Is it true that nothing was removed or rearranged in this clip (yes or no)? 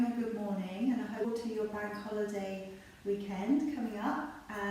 no